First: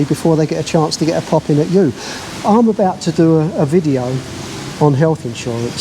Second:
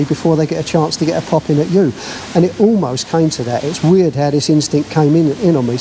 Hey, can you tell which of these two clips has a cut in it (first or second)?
first